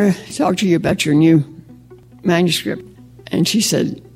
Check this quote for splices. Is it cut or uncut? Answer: cut